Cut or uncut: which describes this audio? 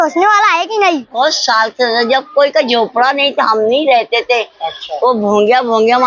cut